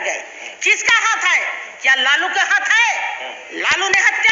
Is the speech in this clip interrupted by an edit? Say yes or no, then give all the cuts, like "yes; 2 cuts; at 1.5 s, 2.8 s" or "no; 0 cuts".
no; 0 cuts